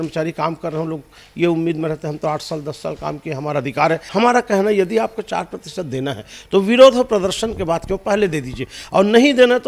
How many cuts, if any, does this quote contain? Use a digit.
1